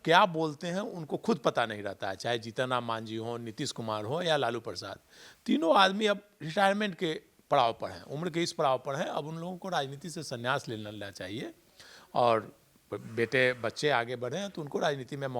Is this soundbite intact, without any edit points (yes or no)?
yes